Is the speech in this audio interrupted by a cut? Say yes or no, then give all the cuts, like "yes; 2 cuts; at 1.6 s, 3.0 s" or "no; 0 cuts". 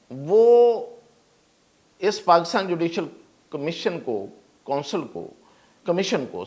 no; 0 cuts